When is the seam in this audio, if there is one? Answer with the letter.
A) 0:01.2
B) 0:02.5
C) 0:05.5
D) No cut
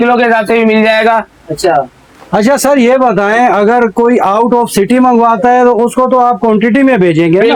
D